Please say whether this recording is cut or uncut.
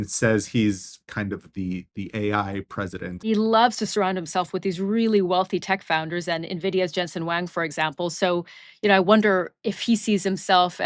cut